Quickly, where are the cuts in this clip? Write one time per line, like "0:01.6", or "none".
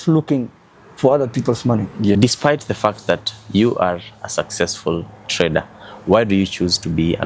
0:02.2